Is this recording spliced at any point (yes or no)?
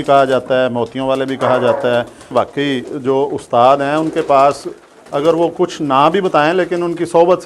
yes